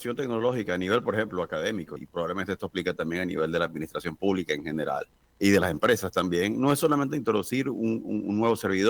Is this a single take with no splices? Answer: no; 2 cuts; at 2.0 s, 5.2 s

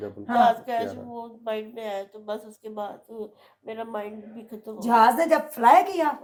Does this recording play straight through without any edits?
yes; 0 cuts

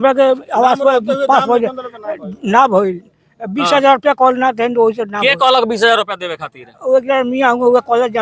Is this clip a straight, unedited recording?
yes; 0 cuts

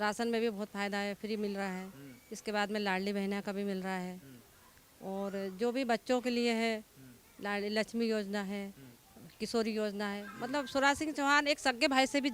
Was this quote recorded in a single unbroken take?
yes; 0 cuts

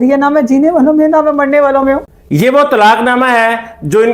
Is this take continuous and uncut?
no; 1 cut; at 2.1 s

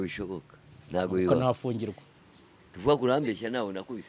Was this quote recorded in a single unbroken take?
no; 1 cut; at 2.1 s

